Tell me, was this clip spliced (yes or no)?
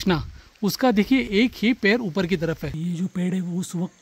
yes